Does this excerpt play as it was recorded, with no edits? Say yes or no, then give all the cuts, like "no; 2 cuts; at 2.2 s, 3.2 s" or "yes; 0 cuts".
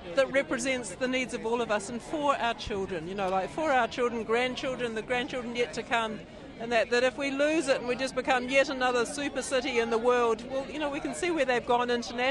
yes; 0 cuts